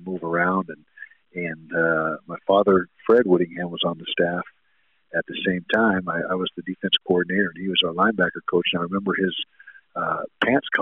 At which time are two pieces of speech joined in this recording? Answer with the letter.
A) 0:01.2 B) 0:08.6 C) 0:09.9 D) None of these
D